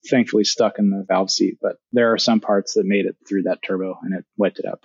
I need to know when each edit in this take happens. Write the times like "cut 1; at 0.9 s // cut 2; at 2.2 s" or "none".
cut 1; at 1.8 s // cut 2; at 3.2 s